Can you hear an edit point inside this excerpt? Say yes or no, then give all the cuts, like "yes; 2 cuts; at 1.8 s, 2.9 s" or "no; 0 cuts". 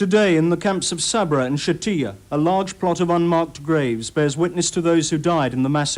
no; 0 cuts